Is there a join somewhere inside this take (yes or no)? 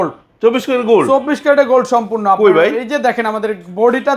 no